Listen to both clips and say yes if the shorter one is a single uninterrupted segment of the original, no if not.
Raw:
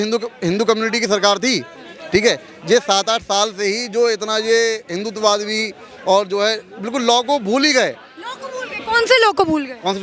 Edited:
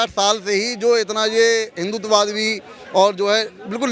yes